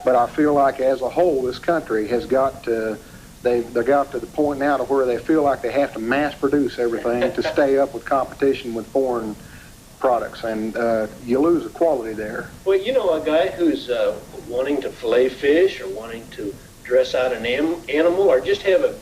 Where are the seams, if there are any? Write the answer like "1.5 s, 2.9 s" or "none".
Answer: 4.4 s